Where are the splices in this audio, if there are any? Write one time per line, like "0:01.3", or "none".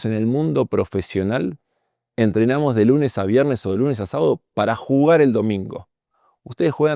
none